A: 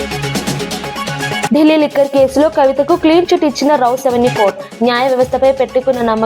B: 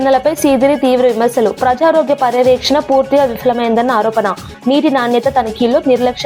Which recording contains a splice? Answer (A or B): A